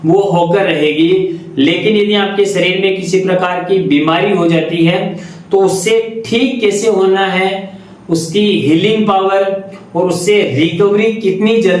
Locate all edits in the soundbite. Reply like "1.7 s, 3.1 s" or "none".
none

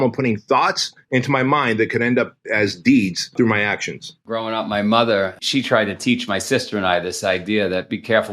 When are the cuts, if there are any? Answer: 0.9 s, 3.8 s, 5.4 s

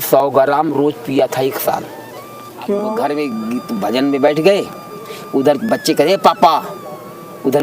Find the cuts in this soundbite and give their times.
2.9 s

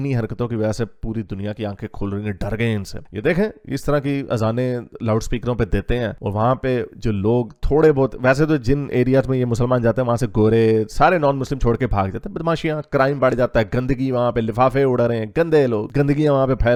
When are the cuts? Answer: none

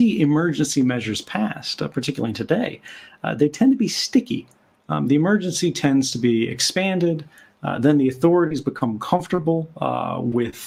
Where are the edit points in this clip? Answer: none

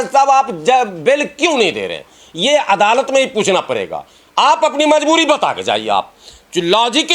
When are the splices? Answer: none

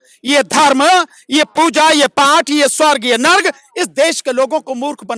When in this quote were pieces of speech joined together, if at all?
none

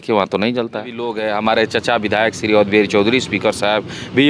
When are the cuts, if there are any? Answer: 1.2 s

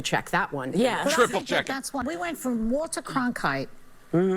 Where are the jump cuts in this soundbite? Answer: 2.0 s

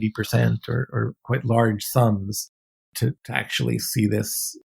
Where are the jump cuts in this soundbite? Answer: 1.2 s, 2.9 s

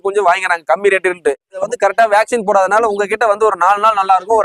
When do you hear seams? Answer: 1.6 s

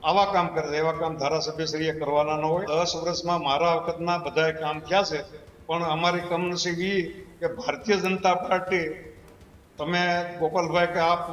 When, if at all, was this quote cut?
2.7 s

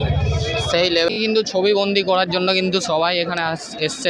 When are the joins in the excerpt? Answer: 1.1 s

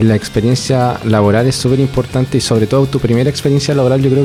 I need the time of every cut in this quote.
none

